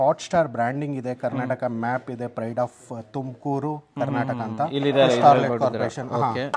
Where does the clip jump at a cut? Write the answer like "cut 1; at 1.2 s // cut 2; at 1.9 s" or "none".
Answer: none